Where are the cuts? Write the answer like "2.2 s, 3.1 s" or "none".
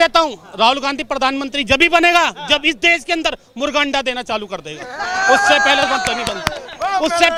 none

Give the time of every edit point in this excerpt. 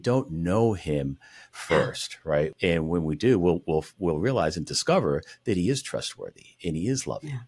2.5 s

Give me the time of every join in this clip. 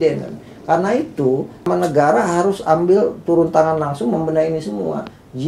1.7 s

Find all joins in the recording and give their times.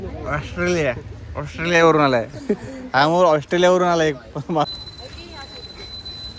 4.7 s

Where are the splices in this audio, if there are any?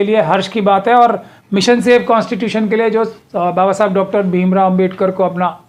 none

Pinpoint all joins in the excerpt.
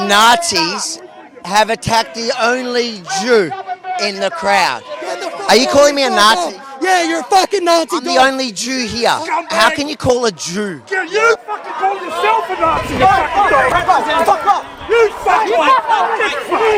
none

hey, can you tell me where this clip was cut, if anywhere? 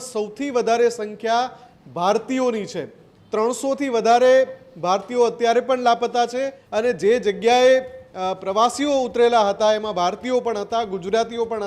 6.6 s

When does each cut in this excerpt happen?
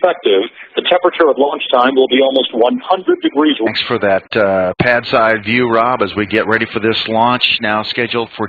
none

